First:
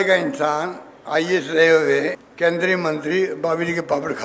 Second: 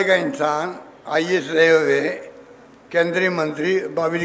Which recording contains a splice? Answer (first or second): first